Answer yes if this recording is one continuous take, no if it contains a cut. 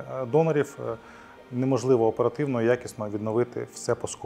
yes